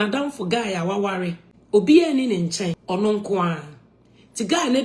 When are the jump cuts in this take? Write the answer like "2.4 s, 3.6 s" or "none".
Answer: 1.5 s, 2.8 s